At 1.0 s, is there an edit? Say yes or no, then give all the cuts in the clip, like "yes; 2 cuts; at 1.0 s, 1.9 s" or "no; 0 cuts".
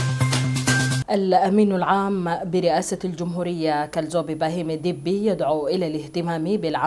yes; 1 cut; at 1.0 s